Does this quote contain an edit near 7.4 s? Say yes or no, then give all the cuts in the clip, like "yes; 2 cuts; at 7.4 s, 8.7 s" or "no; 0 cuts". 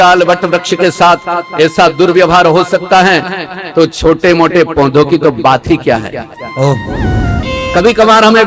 yes; 1 cut; at 7.4 s